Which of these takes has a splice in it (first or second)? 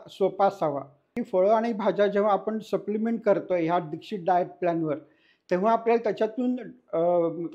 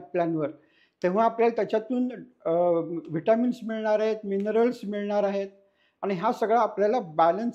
first